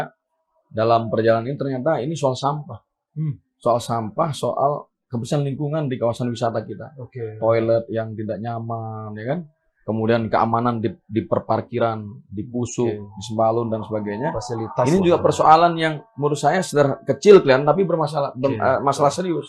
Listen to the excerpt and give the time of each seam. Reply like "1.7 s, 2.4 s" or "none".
none